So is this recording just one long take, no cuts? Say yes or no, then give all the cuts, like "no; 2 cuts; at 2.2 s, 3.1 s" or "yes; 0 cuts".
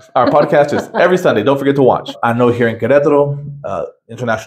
no; 1 cut; at 2.2 s